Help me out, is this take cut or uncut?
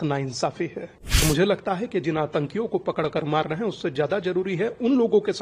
cut